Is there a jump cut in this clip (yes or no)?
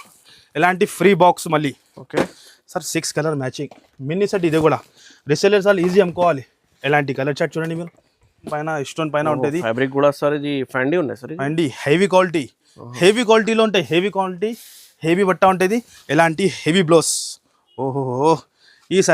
yes